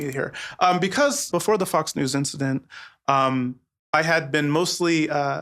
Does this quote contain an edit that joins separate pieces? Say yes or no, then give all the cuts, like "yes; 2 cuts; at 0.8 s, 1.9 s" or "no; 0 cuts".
yes; 1 cut; at 1.3 s